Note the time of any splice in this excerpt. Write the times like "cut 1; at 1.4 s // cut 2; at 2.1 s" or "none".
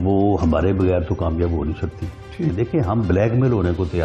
cut 1; at 2.5 s